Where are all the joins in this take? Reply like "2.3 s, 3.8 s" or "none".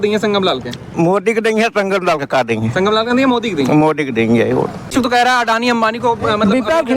4.9 s